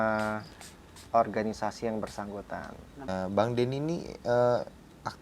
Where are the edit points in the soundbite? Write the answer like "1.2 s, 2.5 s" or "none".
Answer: 3.0 s